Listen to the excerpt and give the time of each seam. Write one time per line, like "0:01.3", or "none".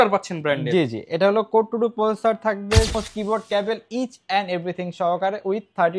0:02.9